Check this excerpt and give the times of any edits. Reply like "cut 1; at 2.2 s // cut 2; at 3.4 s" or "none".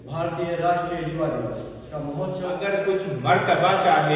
cut 1; at 2.6 s